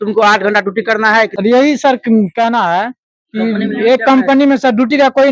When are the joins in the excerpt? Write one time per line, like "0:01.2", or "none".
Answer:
0:01.3